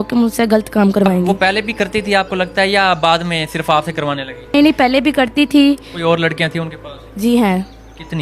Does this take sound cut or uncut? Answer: cut